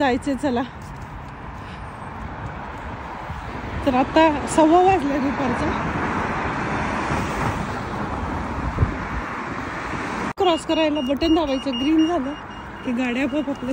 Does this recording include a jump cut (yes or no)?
no